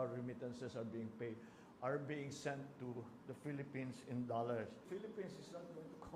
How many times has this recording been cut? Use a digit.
1